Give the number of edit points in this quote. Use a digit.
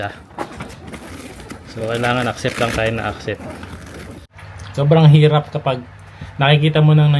1